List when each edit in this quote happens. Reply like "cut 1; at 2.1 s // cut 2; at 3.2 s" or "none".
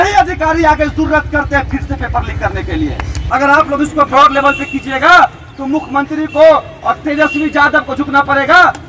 cut 1; at 3.2 s